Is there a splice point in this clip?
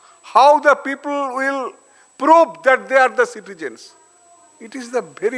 no; 0 cuts

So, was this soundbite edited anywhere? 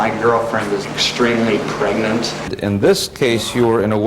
yes; 1 cut; at 2.5 s

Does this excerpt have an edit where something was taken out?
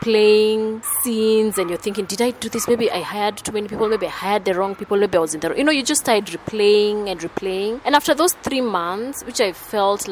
no; 0 cuts

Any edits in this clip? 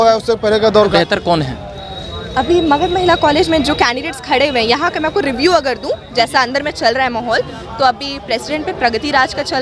yes; 1 cut; at 0.9 s

